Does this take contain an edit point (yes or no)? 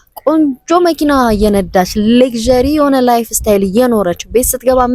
no